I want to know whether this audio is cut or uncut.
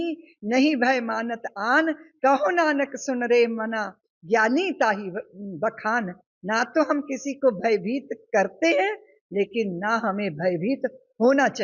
uncut